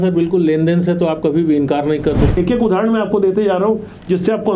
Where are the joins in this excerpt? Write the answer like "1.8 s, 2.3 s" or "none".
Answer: 2.4 s